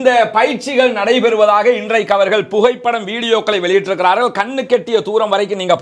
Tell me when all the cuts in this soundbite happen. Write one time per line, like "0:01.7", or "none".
none